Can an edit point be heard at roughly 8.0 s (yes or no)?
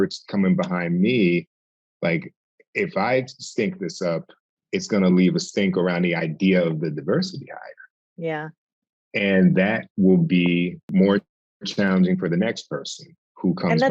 no